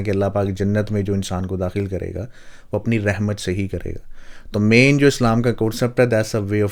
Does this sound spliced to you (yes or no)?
no